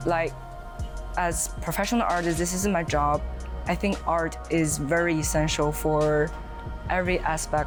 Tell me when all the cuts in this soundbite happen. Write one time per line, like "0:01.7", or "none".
none